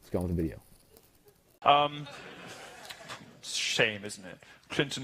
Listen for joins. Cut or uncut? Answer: cut